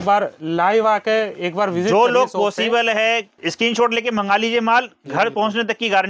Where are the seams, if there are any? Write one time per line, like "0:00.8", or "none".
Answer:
0:03.4

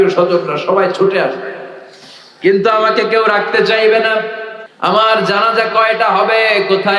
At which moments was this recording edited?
none

